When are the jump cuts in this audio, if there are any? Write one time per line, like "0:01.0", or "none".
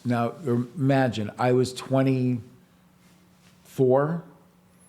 none